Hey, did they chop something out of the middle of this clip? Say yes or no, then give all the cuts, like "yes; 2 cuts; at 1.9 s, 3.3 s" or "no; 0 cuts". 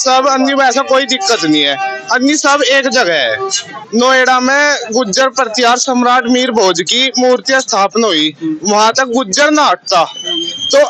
yes; 1 cut; at 3.7 s